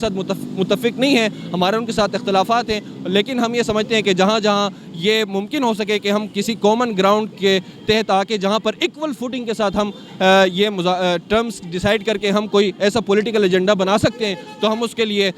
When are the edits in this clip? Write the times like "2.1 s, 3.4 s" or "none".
none